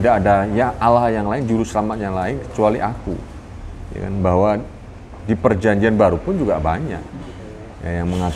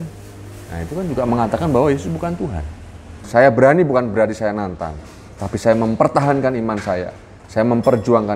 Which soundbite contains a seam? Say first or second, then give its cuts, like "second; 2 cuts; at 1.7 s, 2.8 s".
second; 1 cut; at 3.2 s